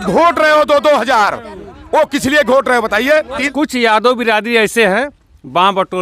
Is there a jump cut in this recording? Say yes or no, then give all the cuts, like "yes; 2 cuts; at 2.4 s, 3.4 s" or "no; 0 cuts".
yes; 1 cut; at 3.4 s